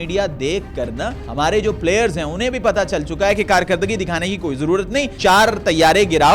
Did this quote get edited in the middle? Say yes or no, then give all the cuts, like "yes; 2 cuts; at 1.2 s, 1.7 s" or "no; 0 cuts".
yes; 2 cuts; at 1.2 s, 5.1 s